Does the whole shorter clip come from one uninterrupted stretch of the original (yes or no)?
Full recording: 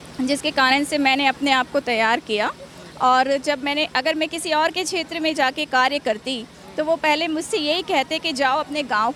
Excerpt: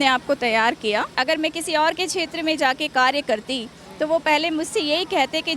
no